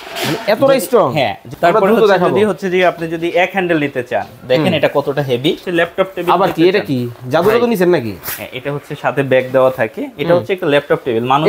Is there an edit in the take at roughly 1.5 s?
yes; 2 cuts; at 1.5 s, 5.6 s

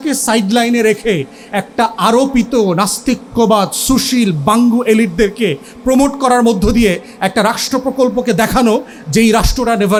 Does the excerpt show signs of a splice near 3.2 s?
no; 0 cuts

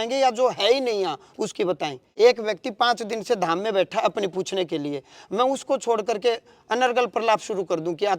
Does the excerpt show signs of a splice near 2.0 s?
yes; 1 cut; at 2.0 s

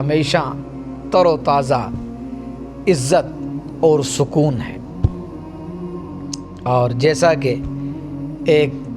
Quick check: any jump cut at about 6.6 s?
yes; 2 cuts; at 5.3 s, 6.6 s

